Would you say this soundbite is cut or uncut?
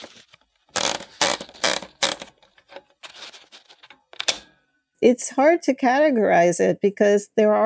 cut